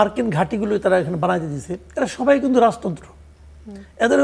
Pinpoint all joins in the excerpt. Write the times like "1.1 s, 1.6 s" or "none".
none